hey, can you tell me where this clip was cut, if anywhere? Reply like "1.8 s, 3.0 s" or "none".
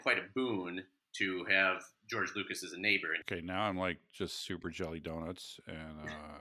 3.2 s